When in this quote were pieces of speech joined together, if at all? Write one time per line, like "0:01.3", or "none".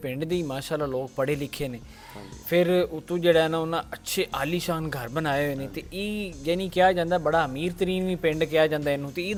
none